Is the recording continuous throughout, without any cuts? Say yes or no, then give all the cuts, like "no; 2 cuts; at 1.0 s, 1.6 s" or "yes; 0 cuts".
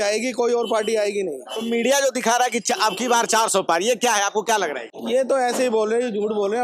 yes; 0 cuts